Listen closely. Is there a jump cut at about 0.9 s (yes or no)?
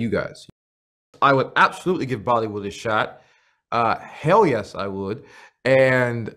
yes